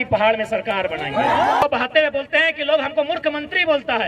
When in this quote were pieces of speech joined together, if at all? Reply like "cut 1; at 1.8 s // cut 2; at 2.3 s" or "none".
cut 1; at 1.6 s